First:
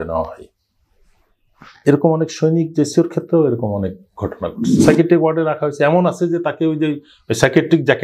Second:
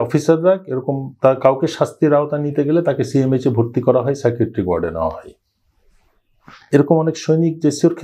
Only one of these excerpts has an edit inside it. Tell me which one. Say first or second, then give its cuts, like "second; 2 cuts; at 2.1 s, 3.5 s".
first; 1 cut; at 4.8 s